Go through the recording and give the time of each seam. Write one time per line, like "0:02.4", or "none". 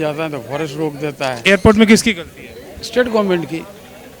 0:01.4